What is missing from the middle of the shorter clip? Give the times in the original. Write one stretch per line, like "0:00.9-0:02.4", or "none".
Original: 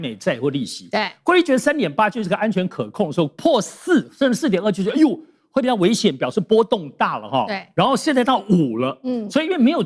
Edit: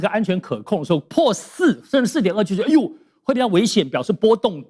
none

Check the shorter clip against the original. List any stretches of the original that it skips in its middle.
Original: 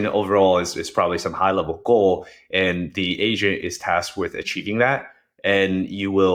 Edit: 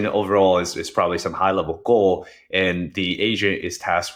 none

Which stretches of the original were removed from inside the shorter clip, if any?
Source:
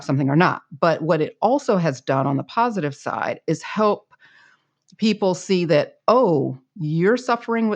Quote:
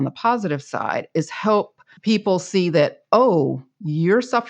0:04.2-0:04.8

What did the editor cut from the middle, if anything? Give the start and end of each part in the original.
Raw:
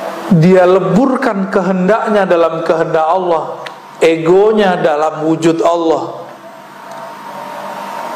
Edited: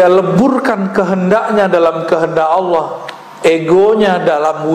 none

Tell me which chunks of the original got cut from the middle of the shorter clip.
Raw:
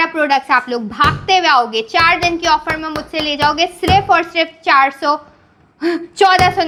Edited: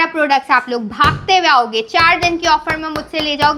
none

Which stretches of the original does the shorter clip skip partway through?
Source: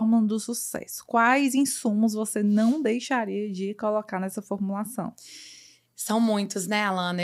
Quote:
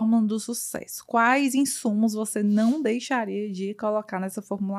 none

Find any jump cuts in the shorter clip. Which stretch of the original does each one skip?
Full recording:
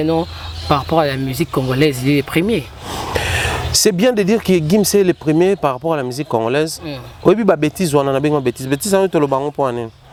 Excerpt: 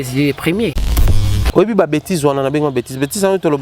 0:03.0-0:06.9

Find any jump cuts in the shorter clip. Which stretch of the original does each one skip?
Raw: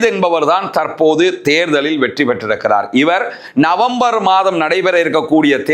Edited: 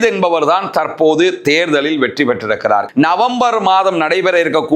0:02.9-0:03.5

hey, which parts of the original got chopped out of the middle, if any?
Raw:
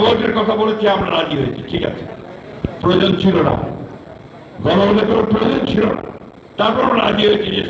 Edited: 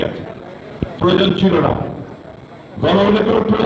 none

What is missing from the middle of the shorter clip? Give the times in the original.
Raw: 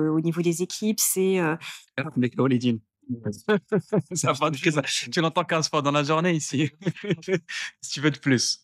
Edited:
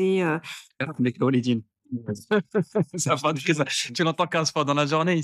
none

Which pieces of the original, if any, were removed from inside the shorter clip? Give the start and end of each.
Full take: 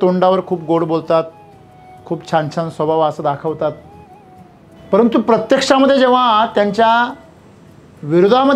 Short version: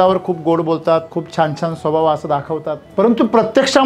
0:01.4-0:02.1
0:03.7-0:04.7

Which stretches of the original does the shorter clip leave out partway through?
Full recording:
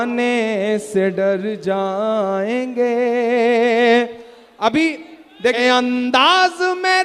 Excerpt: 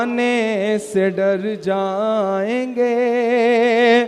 none

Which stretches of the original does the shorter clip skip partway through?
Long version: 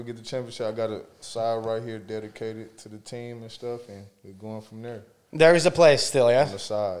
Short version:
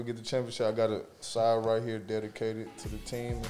none

